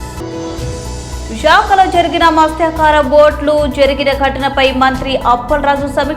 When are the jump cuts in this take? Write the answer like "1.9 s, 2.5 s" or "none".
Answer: 0.9 s